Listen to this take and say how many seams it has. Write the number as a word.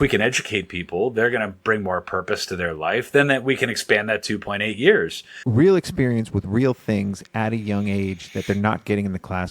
one